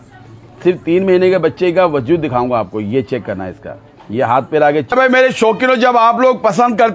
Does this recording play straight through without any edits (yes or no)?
no